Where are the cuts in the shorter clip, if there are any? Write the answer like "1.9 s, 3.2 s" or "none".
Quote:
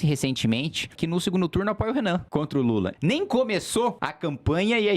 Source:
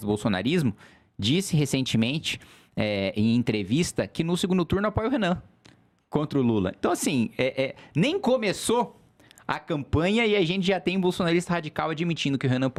1.0 s, 2.8 s, 4.1 s